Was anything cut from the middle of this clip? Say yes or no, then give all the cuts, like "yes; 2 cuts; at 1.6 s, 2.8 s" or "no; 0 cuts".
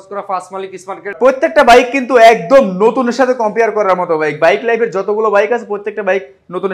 yes; 1 cut; at 1.2 s